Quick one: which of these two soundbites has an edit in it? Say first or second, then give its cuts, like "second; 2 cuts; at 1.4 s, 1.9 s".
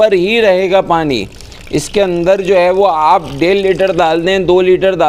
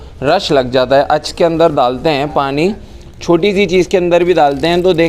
second; 1 cut; at 1.2 s